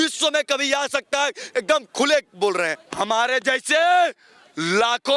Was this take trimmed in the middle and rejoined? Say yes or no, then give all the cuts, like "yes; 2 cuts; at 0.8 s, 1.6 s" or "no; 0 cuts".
yes; 1 cut; at 2.8 s